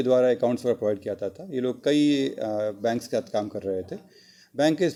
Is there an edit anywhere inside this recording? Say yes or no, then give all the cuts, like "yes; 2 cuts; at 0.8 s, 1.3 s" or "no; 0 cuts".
no; 0 cuts